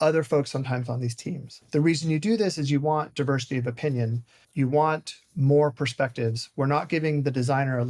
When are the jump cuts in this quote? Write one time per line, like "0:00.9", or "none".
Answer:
0:01.5
0:04.4